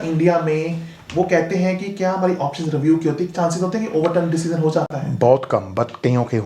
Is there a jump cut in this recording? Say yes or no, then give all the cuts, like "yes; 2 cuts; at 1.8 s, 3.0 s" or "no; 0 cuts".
no; 0 cuts